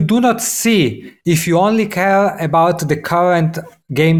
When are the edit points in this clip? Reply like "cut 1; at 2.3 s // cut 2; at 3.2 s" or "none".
none